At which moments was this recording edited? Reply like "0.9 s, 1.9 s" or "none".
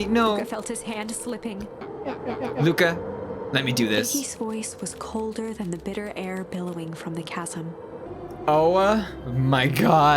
1.8 s, 8.1 s